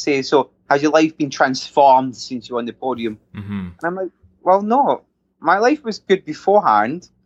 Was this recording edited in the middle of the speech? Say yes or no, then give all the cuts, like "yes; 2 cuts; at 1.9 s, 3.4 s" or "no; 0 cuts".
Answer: no; 0 cuts